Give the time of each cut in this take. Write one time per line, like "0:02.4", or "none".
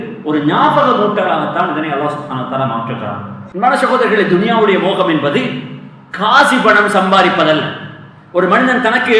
0:03.4